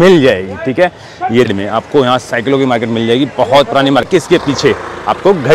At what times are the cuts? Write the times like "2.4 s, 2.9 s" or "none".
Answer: 1.5 s, 4.1 s